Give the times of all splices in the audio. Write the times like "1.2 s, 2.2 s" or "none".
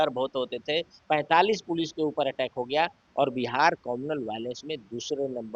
1.0 s